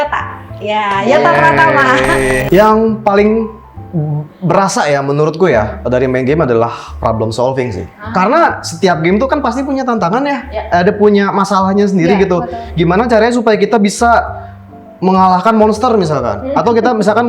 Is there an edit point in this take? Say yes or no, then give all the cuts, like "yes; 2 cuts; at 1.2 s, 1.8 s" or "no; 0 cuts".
yes; 1 cut; at 2.4 s